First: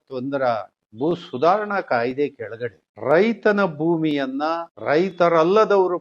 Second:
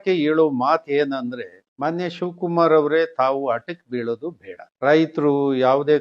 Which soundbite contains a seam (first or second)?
second